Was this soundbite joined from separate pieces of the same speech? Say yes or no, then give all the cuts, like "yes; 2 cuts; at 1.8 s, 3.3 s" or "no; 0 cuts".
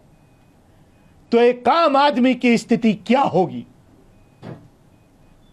no; 0 cuts